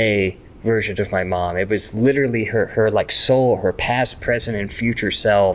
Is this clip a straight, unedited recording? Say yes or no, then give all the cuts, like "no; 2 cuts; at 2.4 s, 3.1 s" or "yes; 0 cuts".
yes; 0 cuts